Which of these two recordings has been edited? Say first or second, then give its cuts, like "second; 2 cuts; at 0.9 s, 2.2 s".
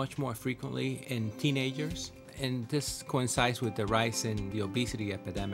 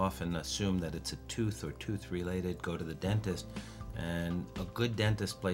first; 3 cuts; at 1.0 s, 2.3 s, 4.5 s